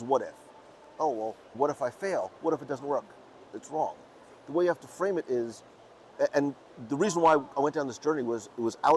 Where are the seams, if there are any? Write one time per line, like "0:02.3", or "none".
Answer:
0:00.9